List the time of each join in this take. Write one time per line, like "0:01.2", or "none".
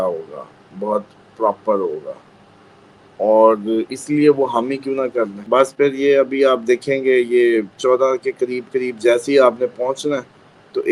0:05.4